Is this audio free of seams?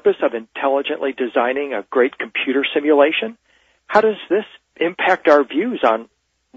no; 1 cut; at 1.3 s

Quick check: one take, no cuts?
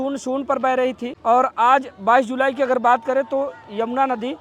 no; 1 cut; at 1.1 s

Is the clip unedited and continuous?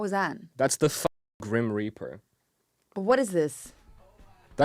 yes; 0 cuts

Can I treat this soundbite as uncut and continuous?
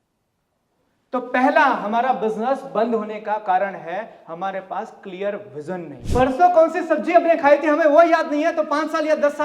no; 1 cut; at 6.0 s

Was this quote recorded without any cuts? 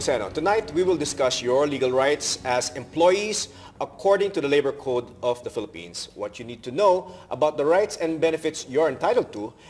yes; 0 cuts

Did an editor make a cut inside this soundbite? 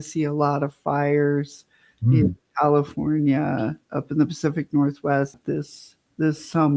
yes; 1 cut; at 5.4 s

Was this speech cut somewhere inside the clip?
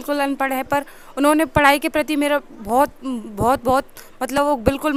no; 0 cuts

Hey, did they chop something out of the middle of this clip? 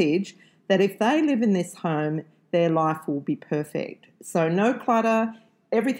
no; 0 cuts

